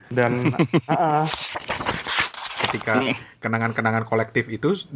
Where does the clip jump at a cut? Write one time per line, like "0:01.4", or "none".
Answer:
0:01.4
0:02.7